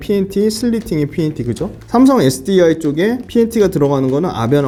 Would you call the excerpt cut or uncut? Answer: uncut